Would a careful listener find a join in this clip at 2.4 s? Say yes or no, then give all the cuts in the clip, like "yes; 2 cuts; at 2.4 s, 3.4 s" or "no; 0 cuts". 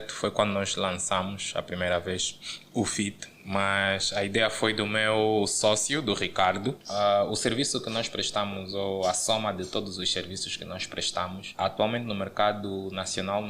no; 1 cut; at 6.8 s